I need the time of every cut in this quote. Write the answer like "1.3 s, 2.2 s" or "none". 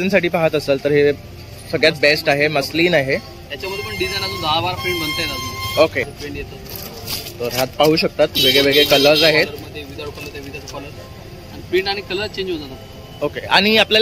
6.1 s